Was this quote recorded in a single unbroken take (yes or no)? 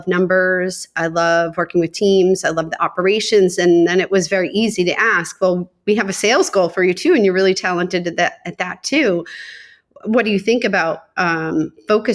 yes